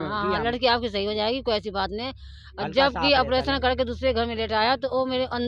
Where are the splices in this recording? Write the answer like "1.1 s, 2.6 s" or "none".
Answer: none